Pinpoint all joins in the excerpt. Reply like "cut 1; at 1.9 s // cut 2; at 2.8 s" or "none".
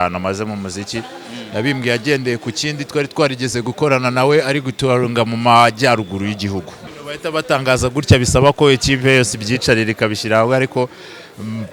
cut 1; at 6.8 s